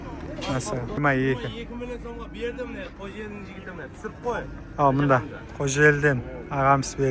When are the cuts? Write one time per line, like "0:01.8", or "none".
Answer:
0:01.0